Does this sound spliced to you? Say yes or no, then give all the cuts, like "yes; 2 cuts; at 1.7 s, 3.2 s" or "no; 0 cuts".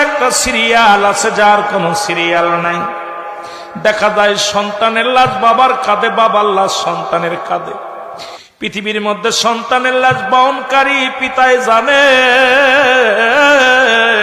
no; 0 cuts